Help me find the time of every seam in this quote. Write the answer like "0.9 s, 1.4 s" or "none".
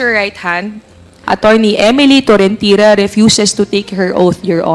1.2 s

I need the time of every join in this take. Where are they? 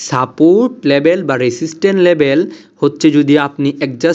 none

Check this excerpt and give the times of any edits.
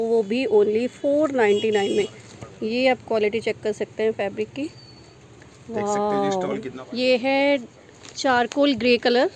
6.8 s

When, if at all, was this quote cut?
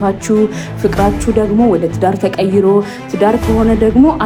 none

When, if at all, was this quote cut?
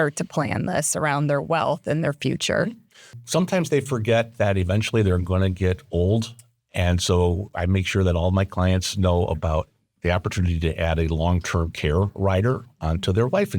3.2 s

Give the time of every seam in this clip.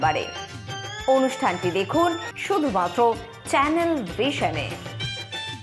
2.3 s

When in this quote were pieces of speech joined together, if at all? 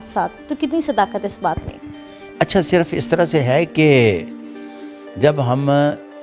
none

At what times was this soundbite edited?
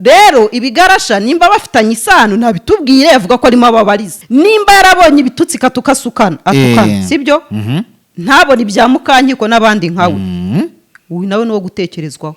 4.1 s

